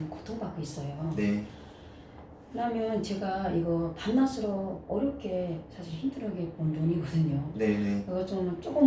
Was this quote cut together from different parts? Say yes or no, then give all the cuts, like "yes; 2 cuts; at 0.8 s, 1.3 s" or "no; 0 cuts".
no; 0 cuts